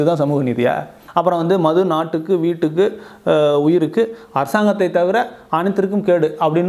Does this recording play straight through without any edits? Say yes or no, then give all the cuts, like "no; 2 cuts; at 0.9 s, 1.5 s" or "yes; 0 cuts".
no; 1 cut; at 0.9 s